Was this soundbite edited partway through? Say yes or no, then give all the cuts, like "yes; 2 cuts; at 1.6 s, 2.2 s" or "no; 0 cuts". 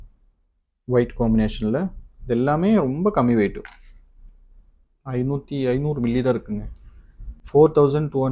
no; 0 cuts